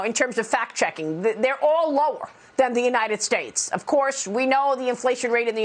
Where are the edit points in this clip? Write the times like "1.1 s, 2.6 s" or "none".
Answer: none

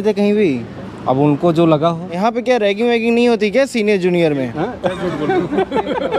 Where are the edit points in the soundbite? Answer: 2.2 s, 4.5 s

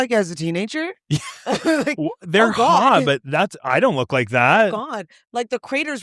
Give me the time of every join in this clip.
none

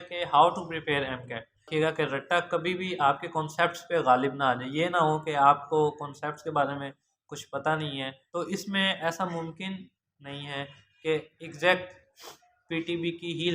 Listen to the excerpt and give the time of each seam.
1.7 s, 8.2 s

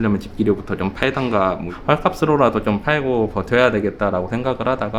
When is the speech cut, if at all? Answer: none

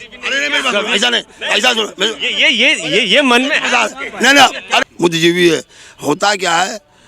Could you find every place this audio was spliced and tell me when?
4.8 s

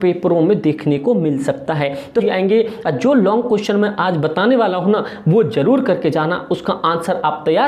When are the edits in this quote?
2.1 s

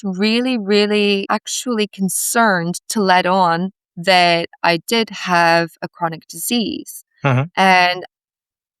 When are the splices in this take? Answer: 1.2 s

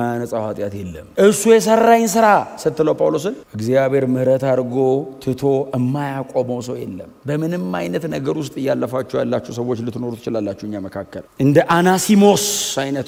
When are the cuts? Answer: none

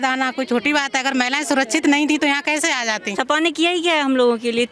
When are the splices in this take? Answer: 3.1 s

